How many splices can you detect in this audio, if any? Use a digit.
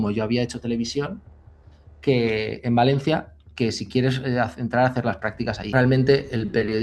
1